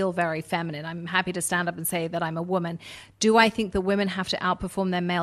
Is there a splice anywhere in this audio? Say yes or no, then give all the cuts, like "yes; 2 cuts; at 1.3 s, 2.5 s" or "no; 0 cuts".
no; 0 cuts